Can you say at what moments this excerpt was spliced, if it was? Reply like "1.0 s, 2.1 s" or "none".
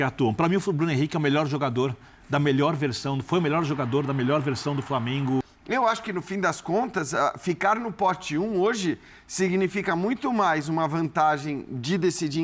5.5 s